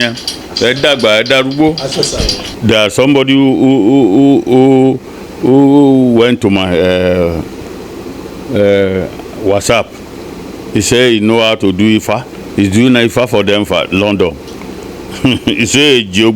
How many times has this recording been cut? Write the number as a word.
one